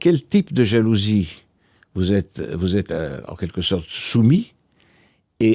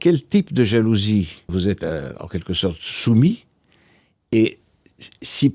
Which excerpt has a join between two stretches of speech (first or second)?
second